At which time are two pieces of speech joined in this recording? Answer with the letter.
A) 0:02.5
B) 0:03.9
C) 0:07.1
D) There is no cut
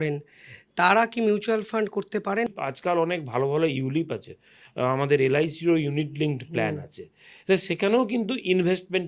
A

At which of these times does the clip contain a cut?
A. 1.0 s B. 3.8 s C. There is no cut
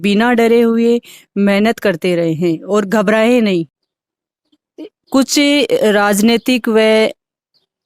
B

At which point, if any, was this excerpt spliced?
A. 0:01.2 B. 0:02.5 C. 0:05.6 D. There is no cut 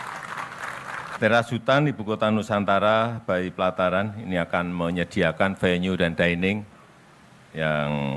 A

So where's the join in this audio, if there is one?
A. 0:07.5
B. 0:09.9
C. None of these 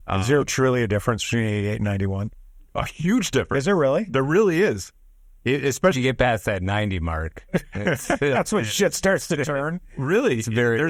C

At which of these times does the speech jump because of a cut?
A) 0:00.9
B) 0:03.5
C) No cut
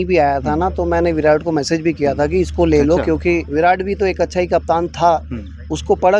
B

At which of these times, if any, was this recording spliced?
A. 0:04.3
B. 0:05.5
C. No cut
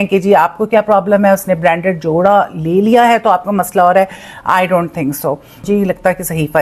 C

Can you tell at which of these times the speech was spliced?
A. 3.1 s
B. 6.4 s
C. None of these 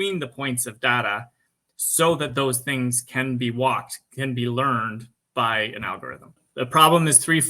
B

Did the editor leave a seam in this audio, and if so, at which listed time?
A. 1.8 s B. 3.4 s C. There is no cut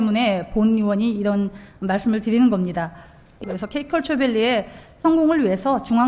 B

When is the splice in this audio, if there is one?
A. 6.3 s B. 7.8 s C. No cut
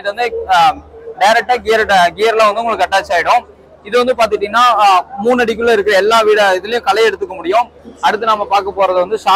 B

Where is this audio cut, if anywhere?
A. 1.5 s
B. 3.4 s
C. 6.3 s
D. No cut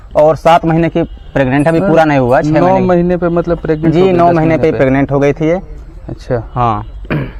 D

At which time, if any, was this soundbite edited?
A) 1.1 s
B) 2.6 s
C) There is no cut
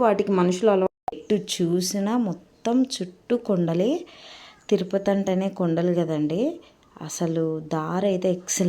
A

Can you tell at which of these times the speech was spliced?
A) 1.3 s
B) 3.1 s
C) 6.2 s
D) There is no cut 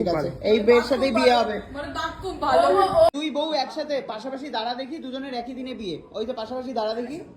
B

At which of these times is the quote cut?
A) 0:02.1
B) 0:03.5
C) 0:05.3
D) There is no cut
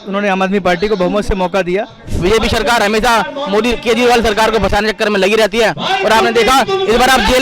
A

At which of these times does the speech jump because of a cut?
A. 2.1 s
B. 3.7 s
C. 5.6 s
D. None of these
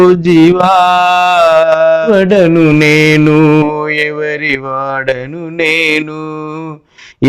A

